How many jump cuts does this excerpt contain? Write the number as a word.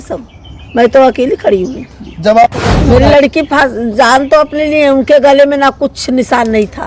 one